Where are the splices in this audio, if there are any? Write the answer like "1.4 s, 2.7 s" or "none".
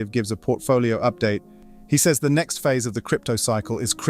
1.5 s